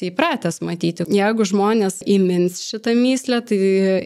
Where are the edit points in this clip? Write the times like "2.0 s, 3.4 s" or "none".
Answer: 1.0 s, 2.0 s